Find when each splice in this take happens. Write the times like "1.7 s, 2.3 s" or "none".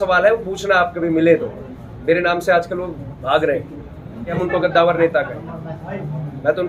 4.4 s